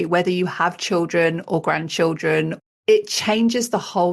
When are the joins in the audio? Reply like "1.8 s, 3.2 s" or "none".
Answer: 2.7 s